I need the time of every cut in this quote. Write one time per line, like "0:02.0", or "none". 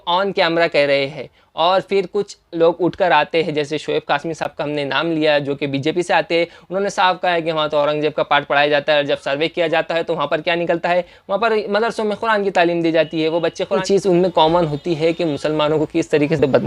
0:13.8